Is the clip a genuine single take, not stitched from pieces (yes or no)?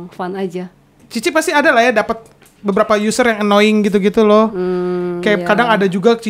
no